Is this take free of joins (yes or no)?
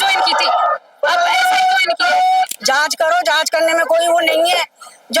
no